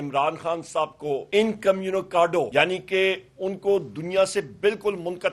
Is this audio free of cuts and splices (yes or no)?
no